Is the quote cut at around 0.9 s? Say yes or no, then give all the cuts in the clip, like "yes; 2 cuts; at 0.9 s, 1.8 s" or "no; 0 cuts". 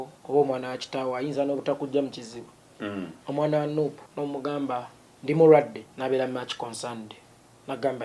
no; 3 cuts; at 2.7 s, 4.0 s, 5.8 s